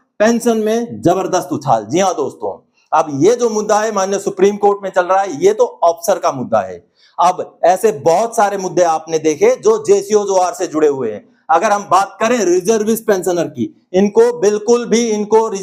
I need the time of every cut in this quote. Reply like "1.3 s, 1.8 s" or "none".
none